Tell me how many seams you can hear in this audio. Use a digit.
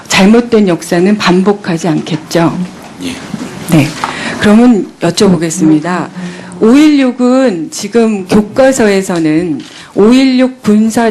1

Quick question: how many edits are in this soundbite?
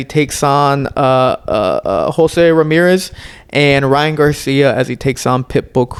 0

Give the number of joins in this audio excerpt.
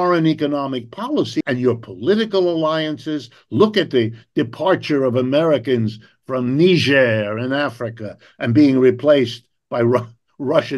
1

